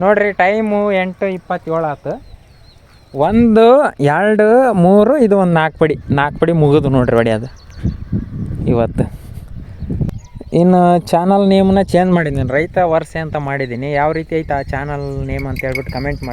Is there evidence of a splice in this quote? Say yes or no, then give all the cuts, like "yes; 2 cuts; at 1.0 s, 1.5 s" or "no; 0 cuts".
yes; 1 cut; at 10.1 s